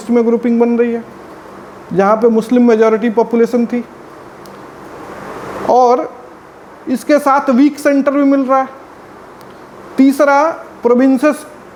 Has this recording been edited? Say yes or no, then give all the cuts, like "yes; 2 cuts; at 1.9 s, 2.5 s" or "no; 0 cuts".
no; 0 cuts